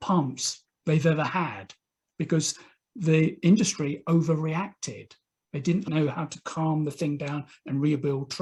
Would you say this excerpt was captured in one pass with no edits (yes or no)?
yes